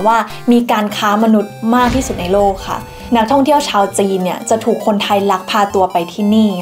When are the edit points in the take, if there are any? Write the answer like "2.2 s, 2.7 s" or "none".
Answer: 3.0 s